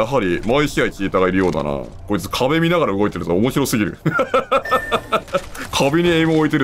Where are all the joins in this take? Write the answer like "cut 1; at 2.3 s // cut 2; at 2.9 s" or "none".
none